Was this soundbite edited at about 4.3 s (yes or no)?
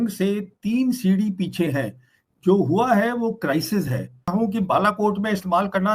yes